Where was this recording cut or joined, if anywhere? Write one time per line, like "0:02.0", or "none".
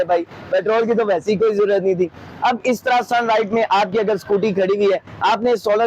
none